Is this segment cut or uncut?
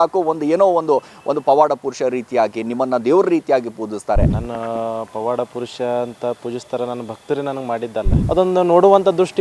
cut